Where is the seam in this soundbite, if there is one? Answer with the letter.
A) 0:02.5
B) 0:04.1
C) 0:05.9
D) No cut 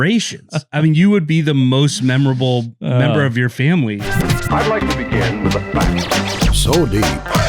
B